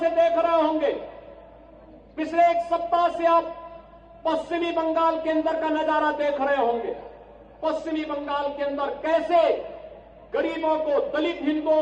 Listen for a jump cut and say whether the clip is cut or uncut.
uncut